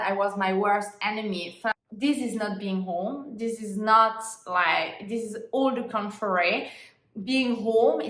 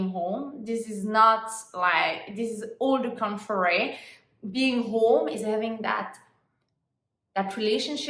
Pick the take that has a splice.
first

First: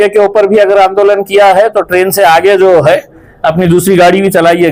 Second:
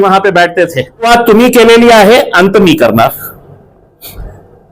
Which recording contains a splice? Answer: second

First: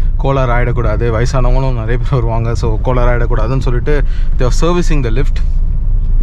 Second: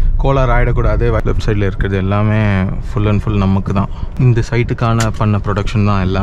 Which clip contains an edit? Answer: second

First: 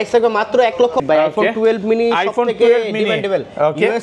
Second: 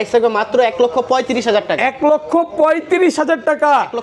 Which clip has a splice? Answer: first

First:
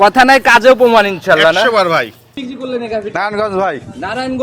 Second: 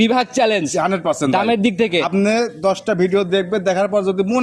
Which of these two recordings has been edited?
first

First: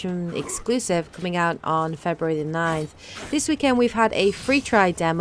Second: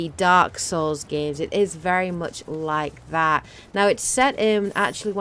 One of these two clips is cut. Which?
first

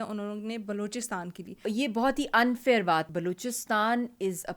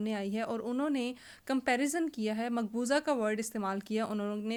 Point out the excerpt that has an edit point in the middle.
first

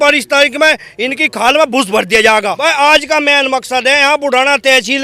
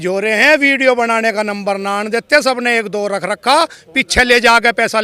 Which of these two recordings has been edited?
first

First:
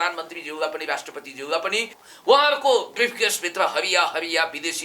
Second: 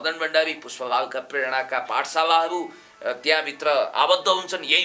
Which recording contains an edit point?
first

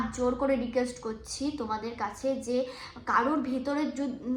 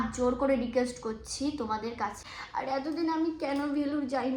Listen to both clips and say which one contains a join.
second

